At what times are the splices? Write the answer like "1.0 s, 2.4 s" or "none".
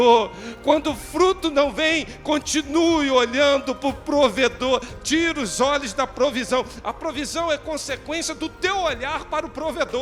none